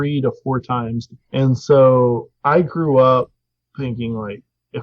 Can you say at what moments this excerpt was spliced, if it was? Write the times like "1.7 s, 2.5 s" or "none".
1.1 s